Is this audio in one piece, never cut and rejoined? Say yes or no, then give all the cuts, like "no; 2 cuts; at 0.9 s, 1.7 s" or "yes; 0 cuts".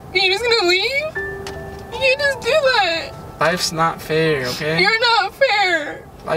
no; 1 cut; at 3.3 s